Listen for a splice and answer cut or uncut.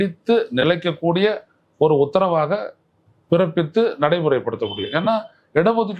uncut